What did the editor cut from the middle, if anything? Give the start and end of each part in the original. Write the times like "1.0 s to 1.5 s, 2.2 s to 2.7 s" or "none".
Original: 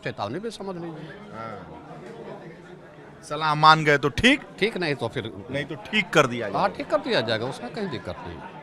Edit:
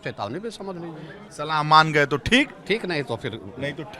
1.2 s to 3.1 s